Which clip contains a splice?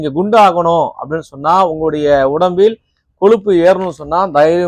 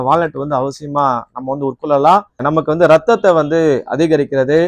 second; 1 cut; at 2.4 s

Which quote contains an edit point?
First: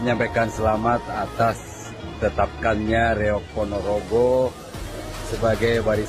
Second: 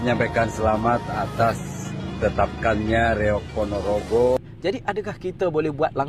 second; 1 cut; at 4.4 s

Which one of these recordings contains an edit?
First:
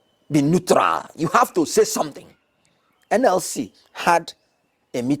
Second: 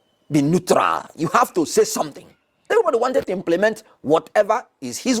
second; 1 cut; at 2.7 s

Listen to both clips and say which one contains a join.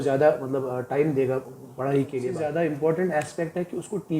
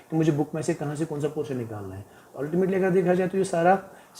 first; 1 cut; at 2.3 s

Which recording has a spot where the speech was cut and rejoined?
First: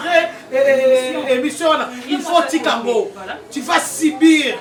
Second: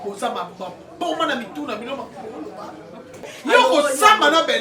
second; 1 cut; at 3.3 s

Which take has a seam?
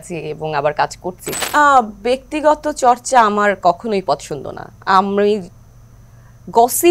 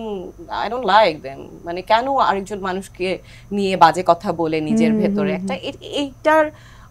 first; 1 cut; at 1.3 s

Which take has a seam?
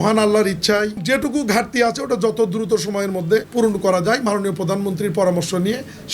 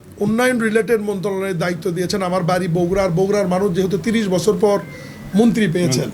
first; 2 cuts; at 1.0 s, 3.5 s

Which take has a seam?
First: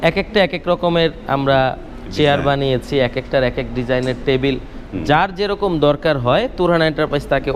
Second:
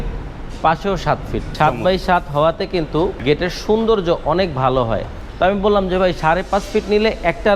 second; 3 cuts; at 1.4 s, 3.2 s, 5.2 s

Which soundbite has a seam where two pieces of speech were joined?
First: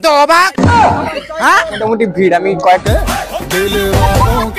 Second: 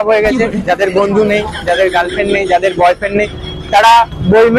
first; 2 cuts; at 1.8 s, 2.8 s

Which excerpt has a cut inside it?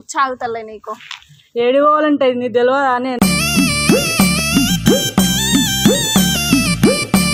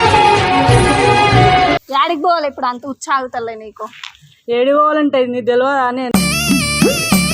second; 1 cut; at 1.9 s

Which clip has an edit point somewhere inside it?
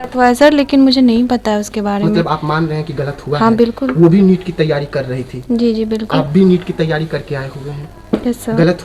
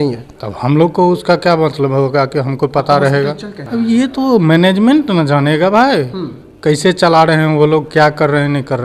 second; 1 cut; at 3.6 s

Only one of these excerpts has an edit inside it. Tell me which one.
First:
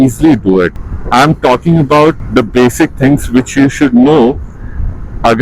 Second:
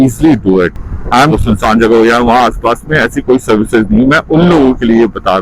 second; 1 cut; at 1.4 s

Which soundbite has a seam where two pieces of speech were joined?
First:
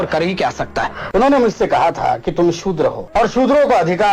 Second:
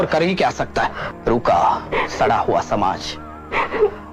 first; 2 cuts; at 1.0 s, 3.0 s

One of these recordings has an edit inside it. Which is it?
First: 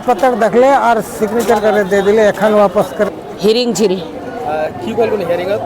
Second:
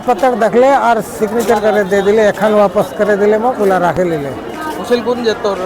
first; 1 cut; at 3.1 s

